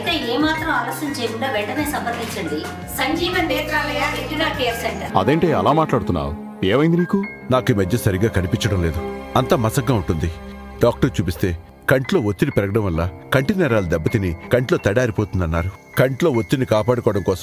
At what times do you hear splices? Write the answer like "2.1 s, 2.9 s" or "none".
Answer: 5.0 s